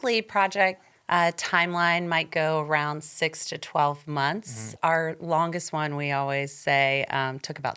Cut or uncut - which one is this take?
cut